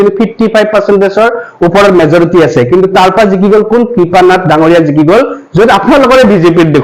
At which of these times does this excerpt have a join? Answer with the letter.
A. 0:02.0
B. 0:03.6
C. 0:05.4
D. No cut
D